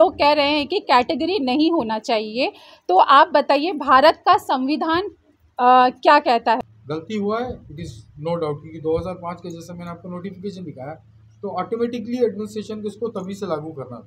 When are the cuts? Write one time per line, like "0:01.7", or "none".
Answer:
0:06.6